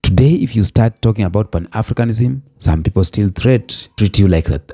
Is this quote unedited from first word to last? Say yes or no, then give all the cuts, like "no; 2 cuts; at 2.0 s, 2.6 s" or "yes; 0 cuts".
yes; 0 cuts